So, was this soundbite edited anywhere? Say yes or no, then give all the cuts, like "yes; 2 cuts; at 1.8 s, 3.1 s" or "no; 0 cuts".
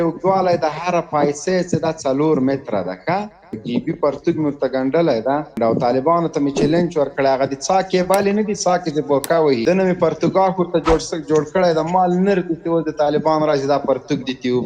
yes; 3 cuts; at 3.6 s, 5.6 s, 9.6 s